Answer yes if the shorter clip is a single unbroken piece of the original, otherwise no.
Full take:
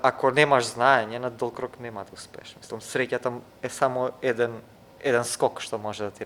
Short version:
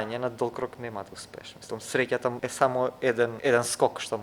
no